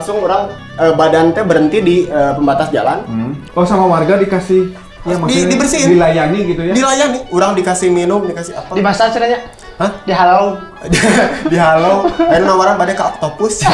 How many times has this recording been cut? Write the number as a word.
one